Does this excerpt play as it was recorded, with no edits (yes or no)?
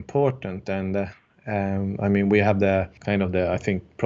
no